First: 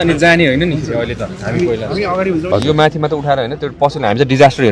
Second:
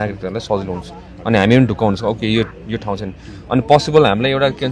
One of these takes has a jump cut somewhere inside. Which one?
first; 1 cut; at 2.5 s

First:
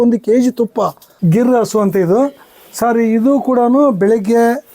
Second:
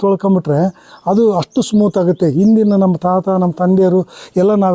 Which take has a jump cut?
first; 1 cut; at 1.1 s

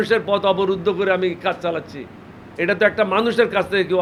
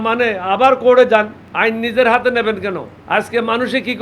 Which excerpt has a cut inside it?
second; 2 cuts; at 1.4 s, 2.9 s

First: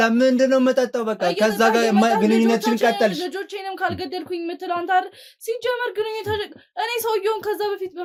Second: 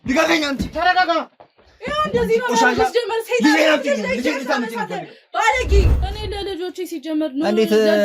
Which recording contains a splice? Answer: second; 1 cut; at 6.1 s

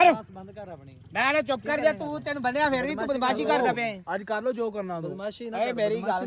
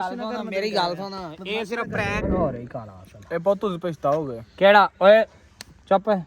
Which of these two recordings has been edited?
second; 1 cut; at 2.2 s

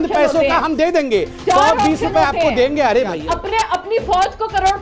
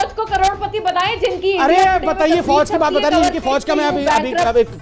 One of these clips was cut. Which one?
first; 1 cut; at 3.2 s

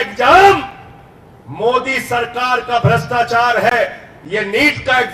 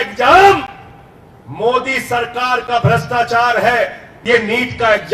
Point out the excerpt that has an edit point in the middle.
second; 1 cut; at 4.1 s

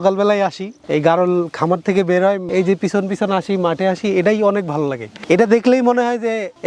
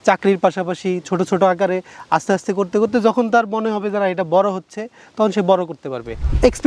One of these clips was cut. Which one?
first; 1 cut; at 2.4 s

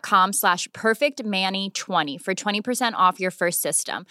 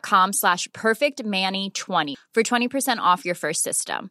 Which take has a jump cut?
second; 1 cut; at 2.1 s

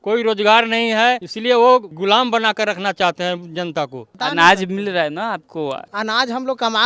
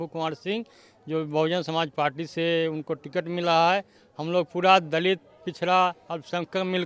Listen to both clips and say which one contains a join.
first; 4 cuts; at 1.3 s, 1.9 s, 4.1 s, 5.8 s

